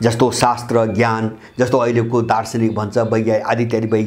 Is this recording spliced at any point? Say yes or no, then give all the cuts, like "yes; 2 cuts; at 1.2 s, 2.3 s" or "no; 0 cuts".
no; 0 cuts